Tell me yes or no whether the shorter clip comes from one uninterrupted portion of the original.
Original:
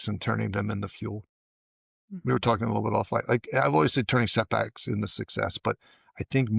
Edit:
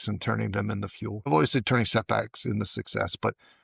no